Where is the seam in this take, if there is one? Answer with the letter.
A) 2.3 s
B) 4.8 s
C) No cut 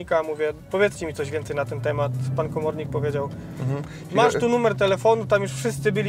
C